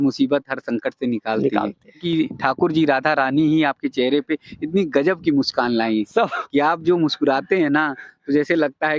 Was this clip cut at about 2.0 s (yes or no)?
yes